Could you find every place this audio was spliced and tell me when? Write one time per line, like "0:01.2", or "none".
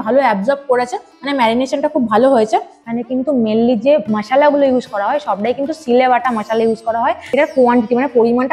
0:02.9
0:07.2